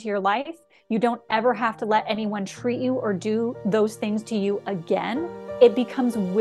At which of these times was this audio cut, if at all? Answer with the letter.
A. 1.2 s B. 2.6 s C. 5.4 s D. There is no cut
C